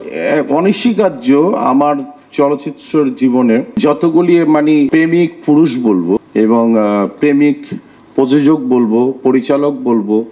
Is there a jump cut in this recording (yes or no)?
yes